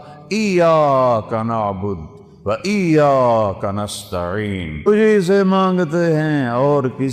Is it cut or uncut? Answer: cut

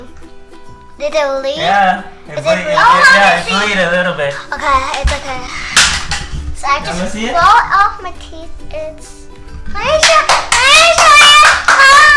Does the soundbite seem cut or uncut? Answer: uncut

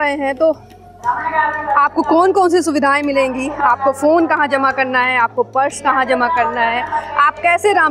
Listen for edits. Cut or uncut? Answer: uncut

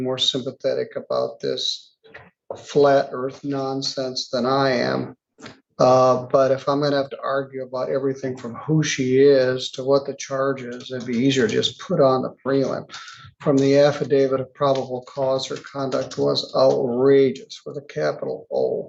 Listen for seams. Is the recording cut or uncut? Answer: uncut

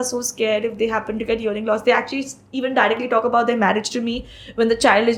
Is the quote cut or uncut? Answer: uncut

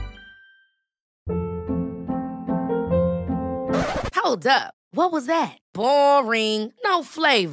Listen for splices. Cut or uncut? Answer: cut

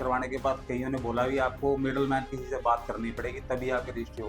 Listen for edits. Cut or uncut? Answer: uncut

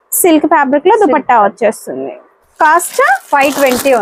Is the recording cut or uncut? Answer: uncut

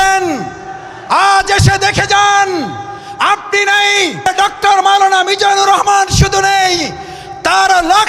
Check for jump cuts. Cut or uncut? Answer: cut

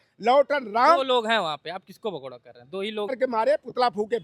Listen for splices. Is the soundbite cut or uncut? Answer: cut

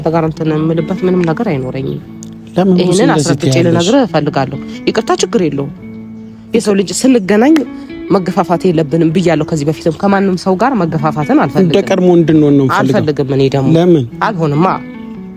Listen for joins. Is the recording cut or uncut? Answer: uncut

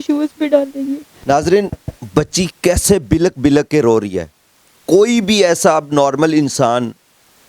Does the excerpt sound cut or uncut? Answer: cut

